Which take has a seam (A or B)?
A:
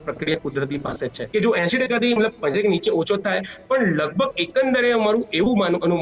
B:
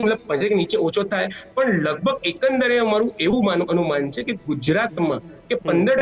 A